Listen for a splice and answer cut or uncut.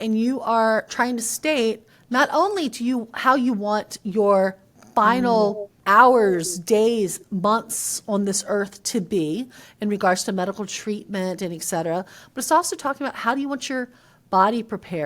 cut